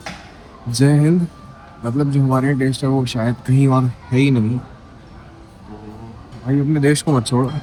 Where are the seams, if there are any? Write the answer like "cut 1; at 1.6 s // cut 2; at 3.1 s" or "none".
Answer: none